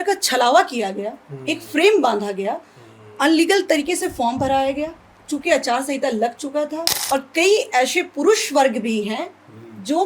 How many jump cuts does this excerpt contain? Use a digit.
1